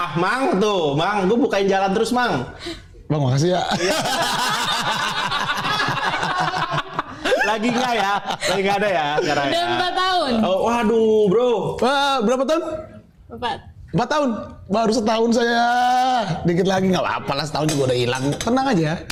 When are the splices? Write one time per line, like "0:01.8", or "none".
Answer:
none